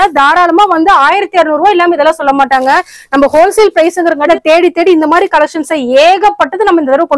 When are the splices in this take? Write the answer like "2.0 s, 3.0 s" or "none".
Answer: 4.2 s